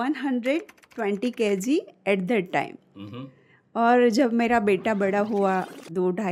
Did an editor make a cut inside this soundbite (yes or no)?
no